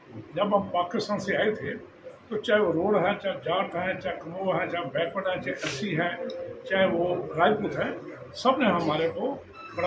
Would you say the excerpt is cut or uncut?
uncut